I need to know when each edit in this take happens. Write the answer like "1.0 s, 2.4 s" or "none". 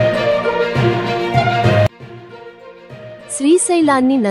none